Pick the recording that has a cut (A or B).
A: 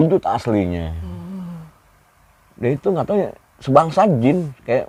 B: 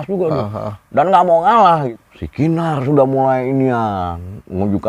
B